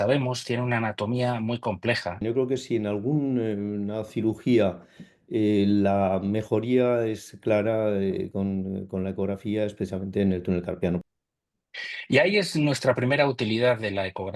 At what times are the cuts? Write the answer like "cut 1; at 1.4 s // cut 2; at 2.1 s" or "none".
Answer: cut 1; at 2.2 s // cut 2; at 11.0 s